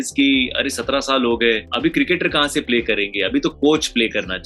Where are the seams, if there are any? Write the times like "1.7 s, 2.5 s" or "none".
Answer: 1.7 s

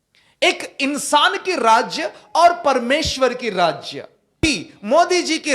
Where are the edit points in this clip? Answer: 4.4 s

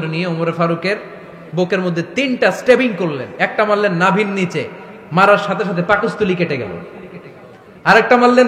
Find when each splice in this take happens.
none

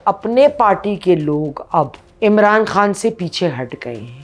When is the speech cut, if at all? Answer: 2.0 s

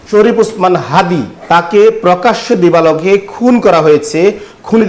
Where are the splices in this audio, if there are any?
1.3 s

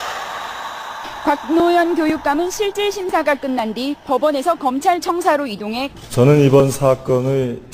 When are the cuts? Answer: 1.1 s

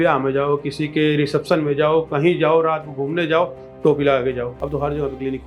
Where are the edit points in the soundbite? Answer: 4.5 s

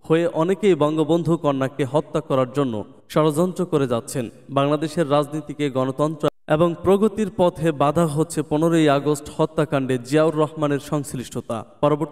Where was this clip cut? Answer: none

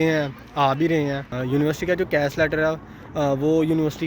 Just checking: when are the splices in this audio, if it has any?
1.3 s

